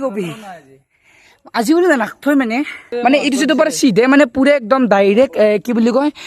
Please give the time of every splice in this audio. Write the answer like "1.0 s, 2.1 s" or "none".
2.8 s